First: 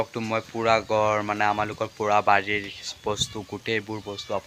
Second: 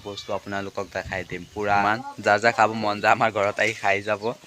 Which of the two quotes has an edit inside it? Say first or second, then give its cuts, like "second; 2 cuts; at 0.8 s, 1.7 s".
second; 1 cut; at 1.8 s